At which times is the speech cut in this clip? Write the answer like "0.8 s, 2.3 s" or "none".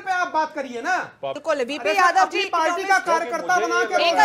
1.4 s